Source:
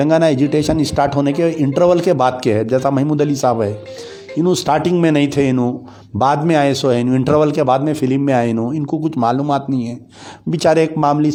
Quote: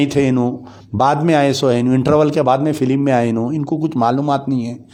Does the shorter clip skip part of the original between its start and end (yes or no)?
no